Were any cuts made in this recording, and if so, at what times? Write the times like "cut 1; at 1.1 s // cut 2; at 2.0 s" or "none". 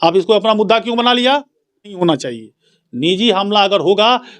cut 1; at 2.0 s